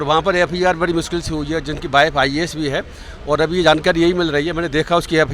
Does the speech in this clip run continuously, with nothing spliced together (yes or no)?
yes